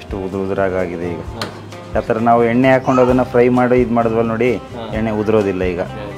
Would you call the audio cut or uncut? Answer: uncut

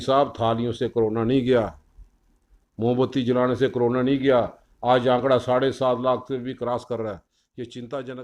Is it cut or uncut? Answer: uncut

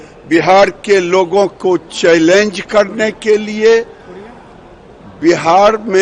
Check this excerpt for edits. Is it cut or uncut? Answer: uncut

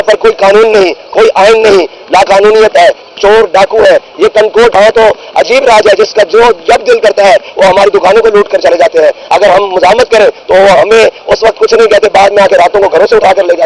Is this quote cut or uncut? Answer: cut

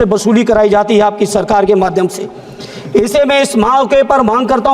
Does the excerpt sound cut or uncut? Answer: uncut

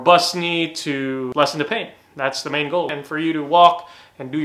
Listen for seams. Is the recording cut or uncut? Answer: cut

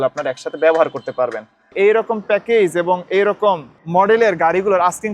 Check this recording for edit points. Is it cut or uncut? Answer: cut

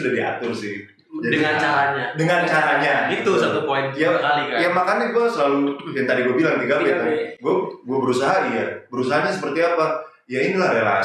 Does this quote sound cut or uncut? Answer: uncut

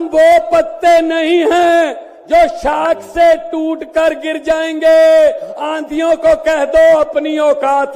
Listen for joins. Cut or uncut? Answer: uncut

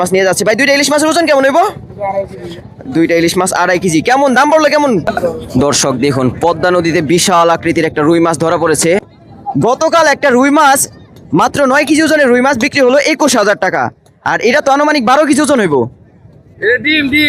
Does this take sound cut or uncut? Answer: cut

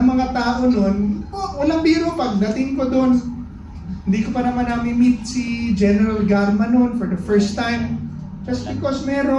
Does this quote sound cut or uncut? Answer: uncut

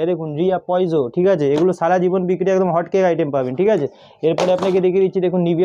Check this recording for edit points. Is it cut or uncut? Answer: uncut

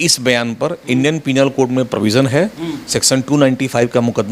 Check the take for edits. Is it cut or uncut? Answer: uncut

